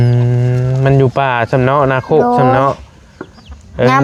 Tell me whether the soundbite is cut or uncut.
uncut